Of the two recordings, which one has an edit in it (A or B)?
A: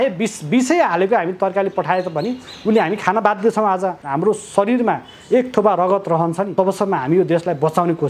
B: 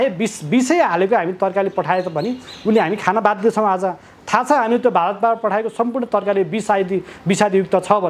A